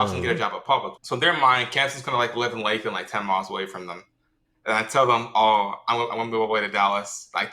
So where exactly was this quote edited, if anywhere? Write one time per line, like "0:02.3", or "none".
0:01.0

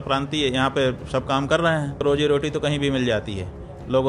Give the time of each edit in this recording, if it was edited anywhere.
0:02.0

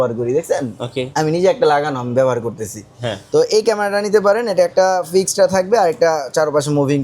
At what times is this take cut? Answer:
0:01.0

